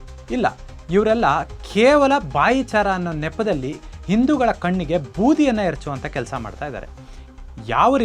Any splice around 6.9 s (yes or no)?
no